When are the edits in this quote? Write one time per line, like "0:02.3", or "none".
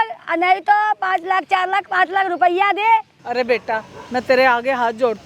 0:03.2